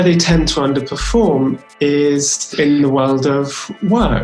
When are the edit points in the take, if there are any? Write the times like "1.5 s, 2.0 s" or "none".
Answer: 2.5 s